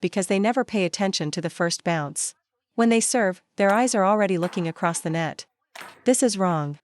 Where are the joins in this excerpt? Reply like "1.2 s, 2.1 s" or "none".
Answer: 5.7 s